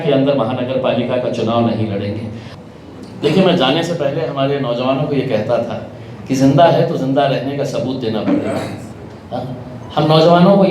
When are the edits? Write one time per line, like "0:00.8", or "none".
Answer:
0:02.5